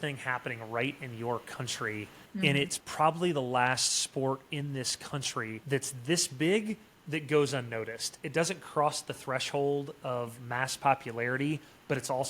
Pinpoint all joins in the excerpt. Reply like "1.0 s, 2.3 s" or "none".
2.2 s, 5.6 s